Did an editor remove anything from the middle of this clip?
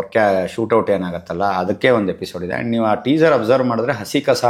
no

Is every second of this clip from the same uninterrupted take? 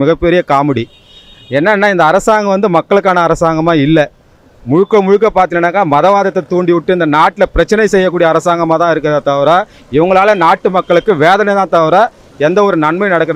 yes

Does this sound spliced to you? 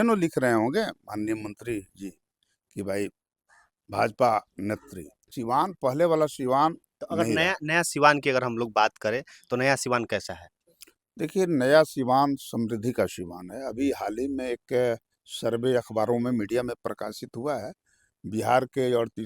yes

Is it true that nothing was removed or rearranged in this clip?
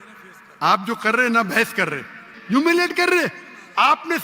no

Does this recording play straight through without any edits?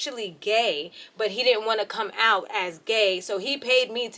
yes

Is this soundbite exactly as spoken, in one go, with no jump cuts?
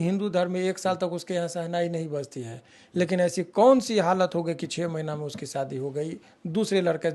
yes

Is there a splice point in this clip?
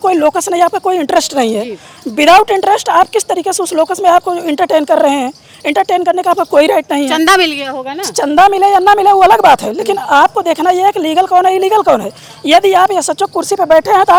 no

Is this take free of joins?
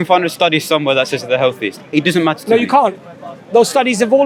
yes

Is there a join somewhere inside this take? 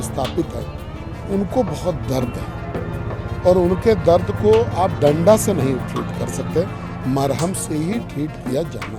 no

